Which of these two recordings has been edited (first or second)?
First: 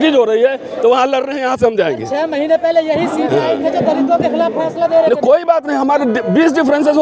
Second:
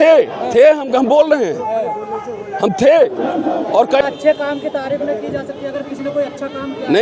second